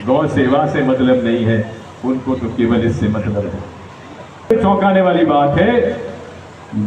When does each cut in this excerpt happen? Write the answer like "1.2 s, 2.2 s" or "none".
4.5 s